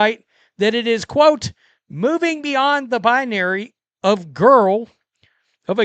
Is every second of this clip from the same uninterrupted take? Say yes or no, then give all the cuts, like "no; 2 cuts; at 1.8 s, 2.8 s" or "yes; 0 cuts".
yes; 0 cuts